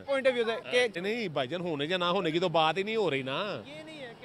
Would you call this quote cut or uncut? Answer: uncut